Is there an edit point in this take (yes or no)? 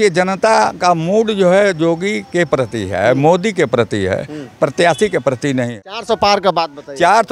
yes